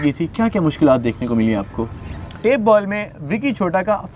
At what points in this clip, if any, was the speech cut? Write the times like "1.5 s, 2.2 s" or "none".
2.4 s